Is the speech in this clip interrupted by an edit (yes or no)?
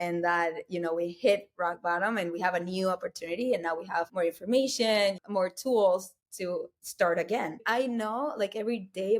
yes